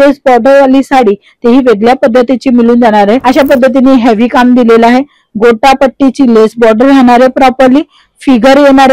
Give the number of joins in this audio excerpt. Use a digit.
1